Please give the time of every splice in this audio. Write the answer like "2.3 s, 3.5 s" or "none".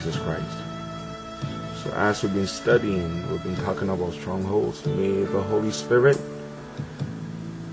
3.5 s